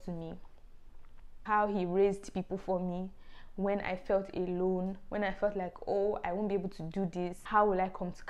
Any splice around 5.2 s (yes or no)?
no